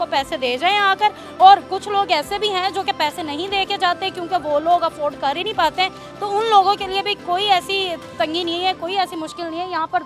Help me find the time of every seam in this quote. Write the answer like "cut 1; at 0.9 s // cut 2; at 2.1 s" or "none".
none